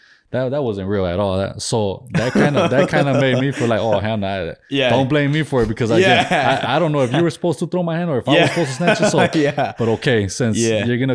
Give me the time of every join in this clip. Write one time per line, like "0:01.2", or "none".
none